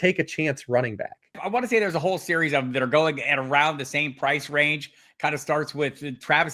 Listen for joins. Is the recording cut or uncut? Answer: uncut